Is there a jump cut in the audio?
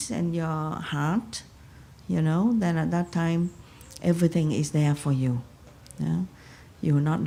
no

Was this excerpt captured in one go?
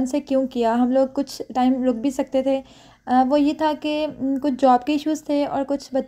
yes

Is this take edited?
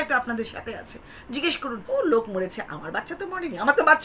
yes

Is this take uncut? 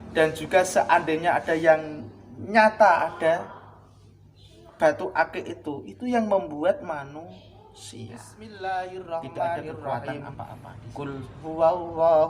no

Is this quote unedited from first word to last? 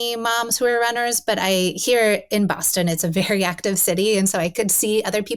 yes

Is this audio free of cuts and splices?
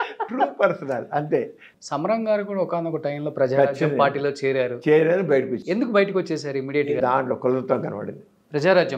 no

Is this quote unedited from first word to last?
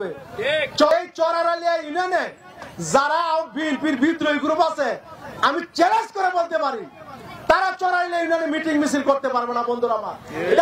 no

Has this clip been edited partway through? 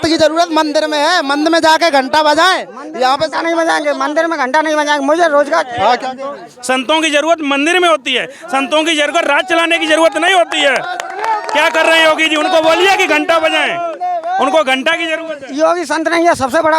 no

